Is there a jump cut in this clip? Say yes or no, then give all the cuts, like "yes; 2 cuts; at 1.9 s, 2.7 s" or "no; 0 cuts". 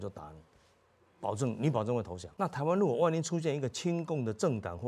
yes; 1 cut; at 2.2 s